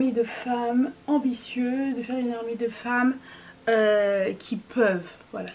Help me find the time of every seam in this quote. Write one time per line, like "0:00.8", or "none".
none